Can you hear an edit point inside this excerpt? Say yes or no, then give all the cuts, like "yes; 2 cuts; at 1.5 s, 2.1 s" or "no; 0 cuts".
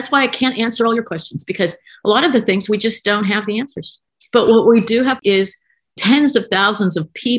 yes; 2 cuts; at 1.1 s, 5.2 s